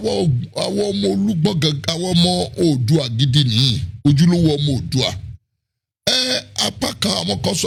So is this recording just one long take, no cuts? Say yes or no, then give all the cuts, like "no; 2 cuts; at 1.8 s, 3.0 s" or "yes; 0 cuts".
yes; 0 cuts